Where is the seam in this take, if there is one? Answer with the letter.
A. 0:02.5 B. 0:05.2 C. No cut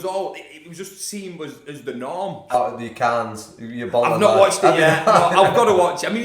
A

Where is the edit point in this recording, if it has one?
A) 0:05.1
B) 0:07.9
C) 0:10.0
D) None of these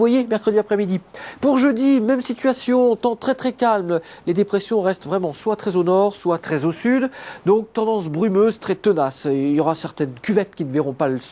B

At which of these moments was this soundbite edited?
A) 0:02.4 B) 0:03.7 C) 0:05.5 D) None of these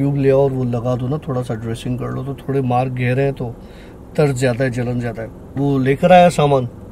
C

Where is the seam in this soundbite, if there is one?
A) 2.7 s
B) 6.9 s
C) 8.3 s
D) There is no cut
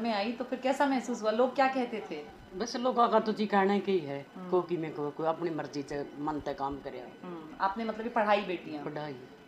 D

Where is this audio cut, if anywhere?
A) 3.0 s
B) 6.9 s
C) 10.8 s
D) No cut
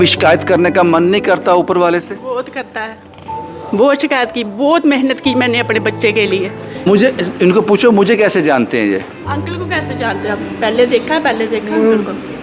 B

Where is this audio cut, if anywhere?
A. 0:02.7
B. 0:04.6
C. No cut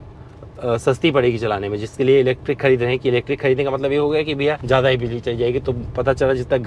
B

